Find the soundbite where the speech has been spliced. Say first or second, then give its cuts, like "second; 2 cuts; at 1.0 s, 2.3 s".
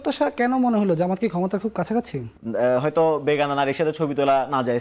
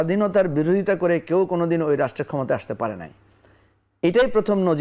first; 1 cut; at 2.2 s